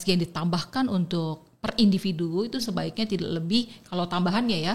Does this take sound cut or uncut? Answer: uncut